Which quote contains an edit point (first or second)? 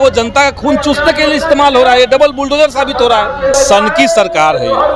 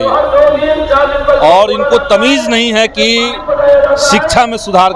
first